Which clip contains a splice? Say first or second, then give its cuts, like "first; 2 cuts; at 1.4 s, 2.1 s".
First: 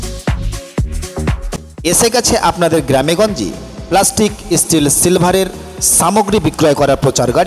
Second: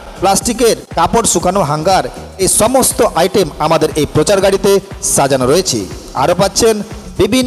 first; 1 cut; at 1.5 s